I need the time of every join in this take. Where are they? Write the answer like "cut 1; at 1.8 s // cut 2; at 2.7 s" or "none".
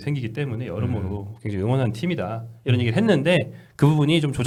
none